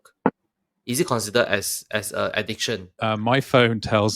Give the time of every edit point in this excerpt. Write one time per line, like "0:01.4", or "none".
0:03.0